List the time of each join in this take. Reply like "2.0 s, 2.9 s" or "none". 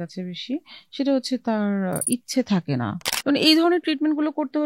3.1 s